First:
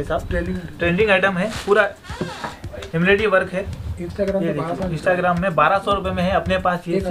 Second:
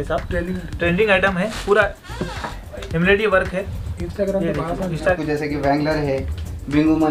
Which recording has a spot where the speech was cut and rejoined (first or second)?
second